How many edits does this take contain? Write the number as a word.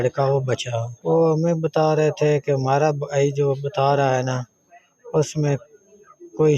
one